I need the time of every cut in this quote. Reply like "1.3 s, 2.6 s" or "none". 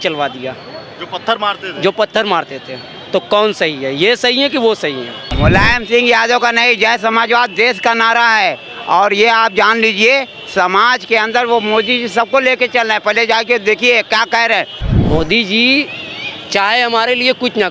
5.2 s, 14.8 s